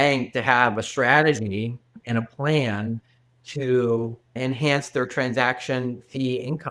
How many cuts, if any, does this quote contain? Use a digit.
1